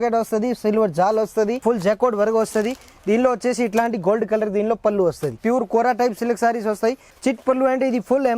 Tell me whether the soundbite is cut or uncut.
cut